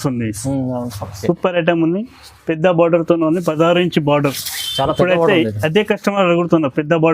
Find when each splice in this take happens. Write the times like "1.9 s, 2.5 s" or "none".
1.1 s